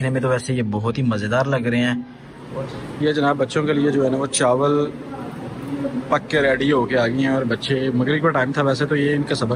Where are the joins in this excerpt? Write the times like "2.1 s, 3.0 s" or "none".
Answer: 2.6 s